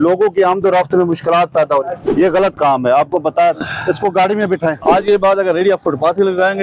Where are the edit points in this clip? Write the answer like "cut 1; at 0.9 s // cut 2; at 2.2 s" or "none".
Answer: cut 1; at 2.0 s // cut 2; at 4.8 s